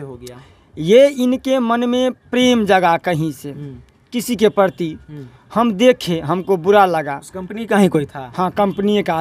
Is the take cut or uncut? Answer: uncut